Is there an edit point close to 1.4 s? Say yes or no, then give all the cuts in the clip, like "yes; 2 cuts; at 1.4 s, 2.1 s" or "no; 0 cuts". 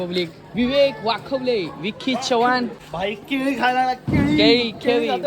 no; 1 cut; at 2.8 s